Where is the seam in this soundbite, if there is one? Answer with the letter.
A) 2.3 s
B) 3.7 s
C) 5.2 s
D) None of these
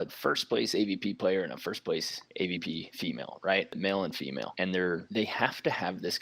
B